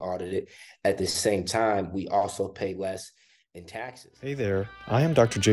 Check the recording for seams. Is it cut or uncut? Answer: cut